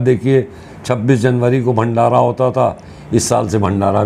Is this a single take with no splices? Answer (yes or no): yes